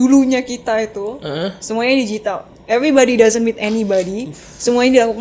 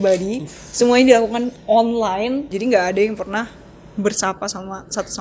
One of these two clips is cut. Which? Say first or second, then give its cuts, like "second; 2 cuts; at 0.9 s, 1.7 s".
second; 1 cut; at 2.5 s